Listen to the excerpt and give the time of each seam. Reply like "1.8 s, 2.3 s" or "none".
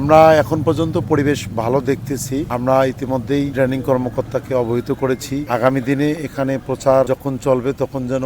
2.5 s, 3.5 s, 5.4 s, 7.1 s